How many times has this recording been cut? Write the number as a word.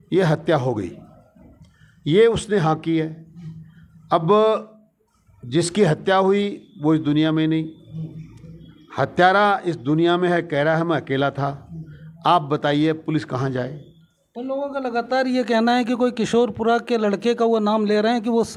zero